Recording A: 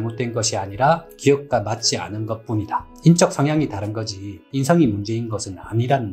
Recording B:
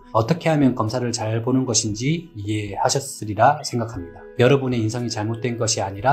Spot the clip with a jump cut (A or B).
B